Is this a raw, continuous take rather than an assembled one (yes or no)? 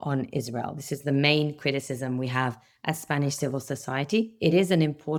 yes